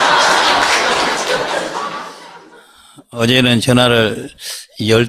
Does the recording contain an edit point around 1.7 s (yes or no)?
no